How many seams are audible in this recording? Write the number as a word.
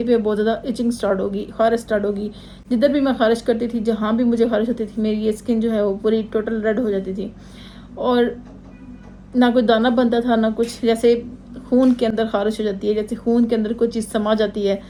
zero